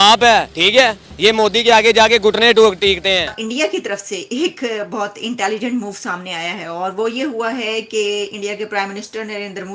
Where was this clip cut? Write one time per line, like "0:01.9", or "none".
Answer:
0:03.3